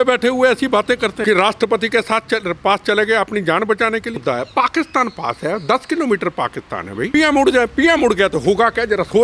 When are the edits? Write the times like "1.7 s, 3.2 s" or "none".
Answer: 1.2 s, 4.2 s, 7.1 s